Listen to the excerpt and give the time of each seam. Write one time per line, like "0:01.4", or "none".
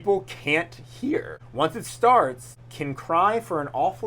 0:01.4
0:02.5